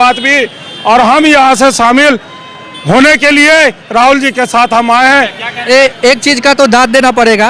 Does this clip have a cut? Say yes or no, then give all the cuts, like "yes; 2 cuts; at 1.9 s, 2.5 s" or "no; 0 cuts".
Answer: no; 0 cuts